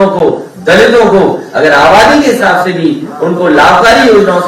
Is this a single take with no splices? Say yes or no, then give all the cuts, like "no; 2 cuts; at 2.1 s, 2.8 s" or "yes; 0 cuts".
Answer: yes; 0 cuts